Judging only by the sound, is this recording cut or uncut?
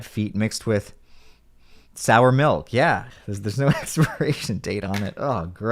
cut